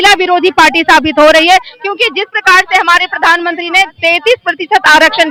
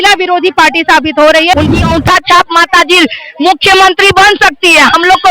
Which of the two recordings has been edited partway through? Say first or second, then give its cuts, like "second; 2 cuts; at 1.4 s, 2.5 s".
second; 1 cut; at 1.5 s